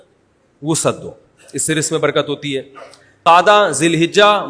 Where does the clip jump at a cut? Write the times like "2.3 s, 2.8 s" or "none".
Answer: 3.2 s